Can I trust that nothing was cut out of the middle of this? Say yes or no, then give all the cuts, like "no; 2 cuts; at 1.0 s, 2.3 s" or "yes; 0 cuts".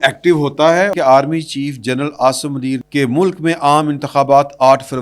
no; 2 cuts; at 0.9 s, 2.8 s